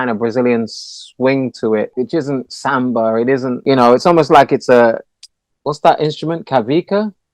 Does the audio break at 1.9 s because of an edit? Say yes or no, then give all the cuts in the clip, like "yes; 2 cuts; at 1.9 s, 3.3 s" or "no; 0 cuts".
yes; 2 cuts; at 1.9 s, 3.6 s